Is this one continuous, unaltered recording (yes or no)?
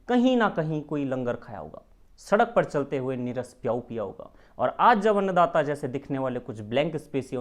yes